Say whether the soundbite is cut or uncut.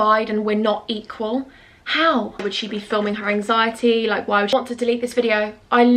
cut